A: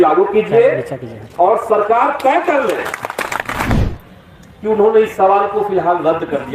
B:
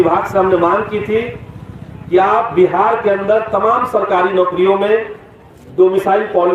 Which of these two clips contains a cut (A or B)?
A